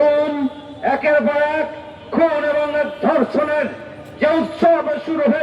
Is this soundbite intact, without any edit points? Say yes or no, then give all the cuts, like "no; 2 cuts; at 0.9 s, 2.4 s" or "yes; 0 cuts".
yes; 0 cuts